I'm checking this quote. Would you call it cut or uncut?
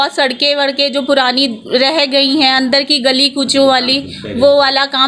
uncut